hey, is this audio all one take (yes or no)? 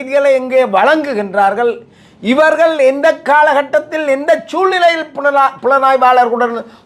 yes